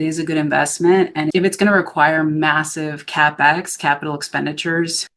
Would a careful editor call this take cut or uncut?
uncut